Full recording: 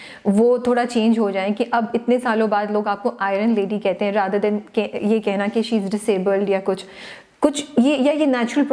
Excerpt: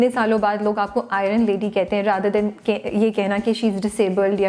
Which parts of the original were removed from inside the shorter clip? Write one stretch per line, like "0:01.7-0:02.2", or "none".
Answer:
none